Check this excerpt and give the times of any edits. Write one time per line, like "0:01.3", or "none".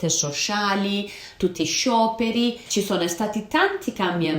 0:02.6